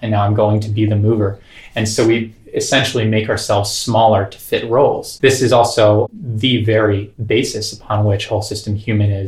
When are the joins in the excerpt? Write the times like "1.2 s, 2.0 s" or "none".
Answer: 5.1 s, 6.1 s, 7.1 s